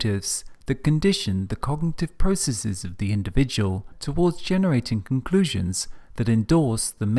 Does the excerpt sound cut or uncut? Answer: uncut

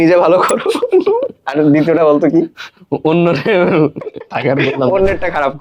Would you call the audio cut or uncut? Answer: uncut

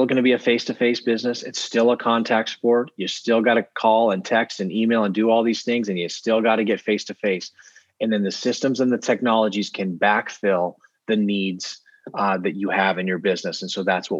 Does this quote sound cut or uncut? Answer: uncut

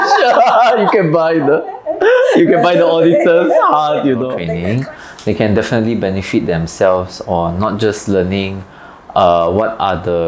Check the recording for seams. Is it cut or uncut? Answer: cut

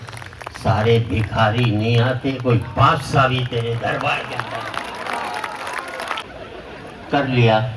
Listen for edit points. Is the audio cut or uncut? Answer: cut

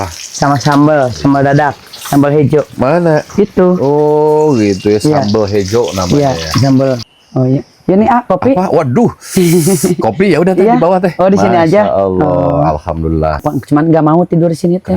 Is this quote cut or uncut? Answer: cut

